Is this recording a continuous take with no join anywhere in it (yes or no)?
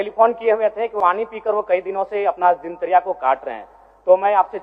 no